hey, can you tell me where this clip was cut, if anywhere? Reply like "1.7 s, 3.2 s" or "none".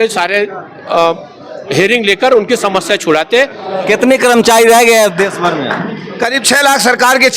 3.7 s